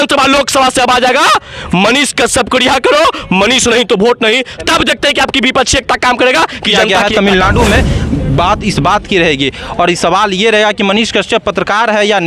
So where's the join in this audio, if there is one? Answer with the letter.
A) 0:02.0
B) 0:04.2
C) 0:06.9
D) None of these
C